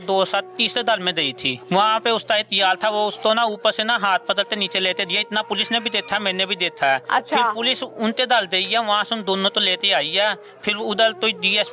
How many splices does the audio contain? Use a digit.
1